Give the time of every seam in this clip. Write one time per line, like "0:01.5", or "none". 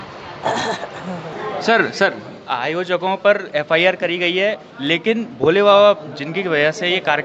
0:01.4